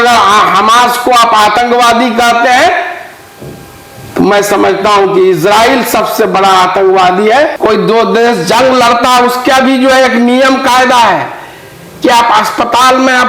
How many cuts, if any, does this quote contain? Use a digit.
1